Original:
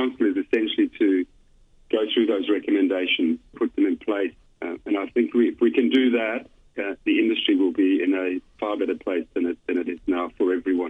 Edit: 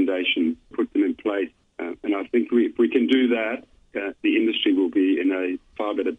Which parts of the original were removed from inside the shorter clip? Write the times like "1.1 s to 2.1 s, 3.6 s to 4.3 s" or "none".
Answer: none